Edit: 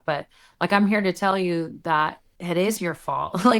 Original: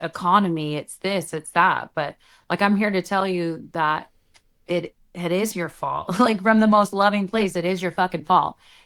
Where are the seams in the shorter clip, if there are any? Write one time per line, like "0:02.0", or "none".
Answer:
0:02.3